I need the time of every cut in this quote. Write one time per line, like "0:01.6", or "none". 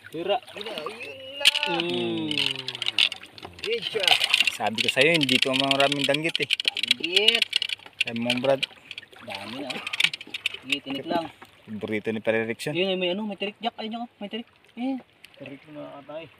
none